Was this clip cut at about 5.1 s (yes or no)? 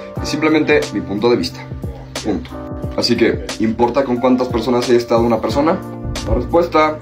no